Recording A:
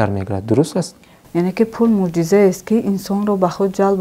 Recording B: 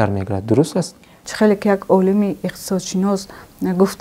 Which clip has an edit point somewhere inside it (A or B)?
A